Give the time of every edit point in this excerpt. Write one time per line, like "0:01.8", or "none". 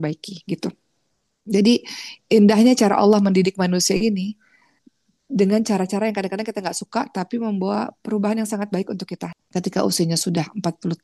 0:09.2